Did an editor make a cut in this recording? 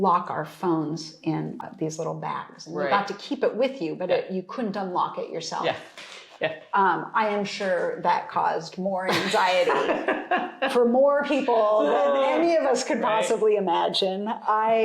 yes; 1 cut; at 1.6 s

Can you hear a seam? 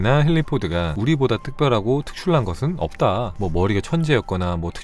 yes; 2 cuts; at 0.9 s, 3.3 s

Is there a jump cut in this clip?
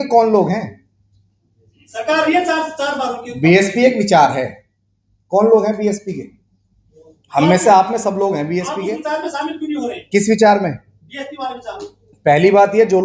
no; 0 cuts

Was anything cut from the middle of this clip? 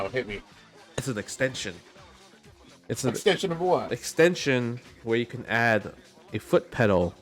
no; 0 cuts

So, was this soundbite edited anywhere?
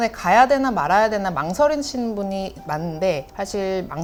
no; 0 cuts

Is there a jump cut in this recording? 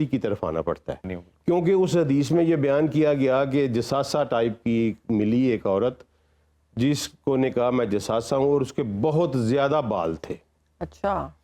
yes; 1 cut; at 1.1 s

